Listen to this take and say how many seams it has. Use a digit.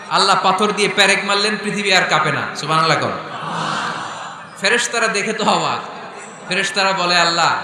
0